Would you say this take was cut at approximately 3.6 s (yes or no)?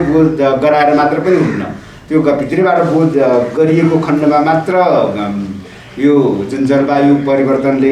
no